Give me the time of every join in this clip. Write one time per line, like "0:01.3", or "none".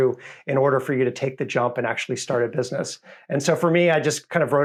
none

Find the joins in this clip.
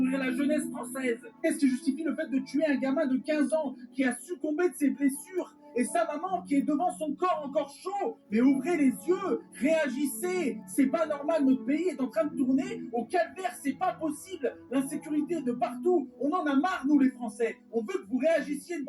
0:18.0

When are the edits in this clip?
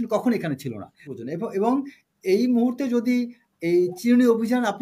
0:01.0

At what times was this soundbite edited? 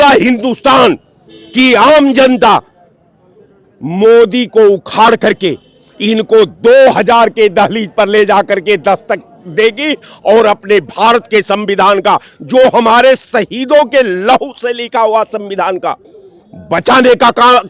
none

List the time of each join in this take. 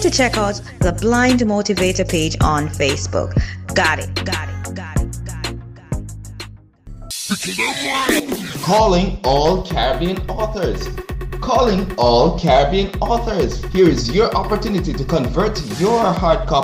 0:07.1

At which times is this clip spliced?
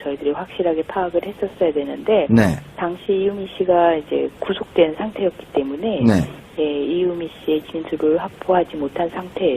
0:01.5

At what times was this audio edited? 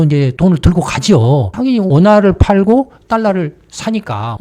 0:01.9

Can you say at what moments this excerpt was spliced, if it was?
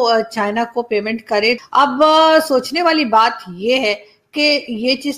0:01.6

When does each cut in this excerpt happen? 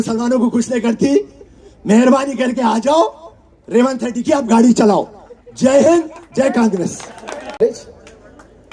0:07.5

